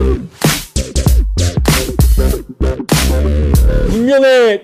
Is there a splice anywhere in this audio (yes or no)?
no